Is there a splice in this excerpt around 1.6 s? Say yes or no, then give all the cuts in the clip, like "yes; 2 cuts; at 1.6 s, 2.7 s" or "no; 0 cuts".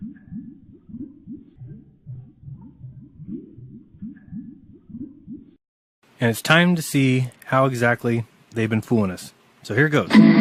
yes; 2 cuts; at 1.6 s, 5.4 s